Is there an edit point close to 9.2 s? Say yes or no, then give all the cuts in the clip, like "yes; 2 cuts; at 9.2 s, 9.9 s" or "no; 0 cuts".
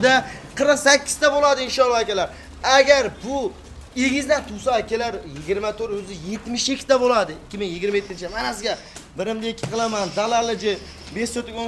no; 0 cuts